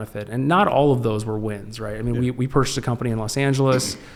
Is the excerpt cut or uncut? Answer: uncut